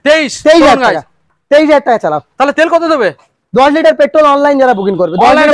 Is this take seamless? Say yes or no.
yes